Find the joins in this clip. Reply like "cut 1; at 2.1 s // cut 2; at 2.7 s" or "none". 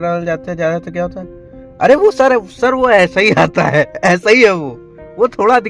none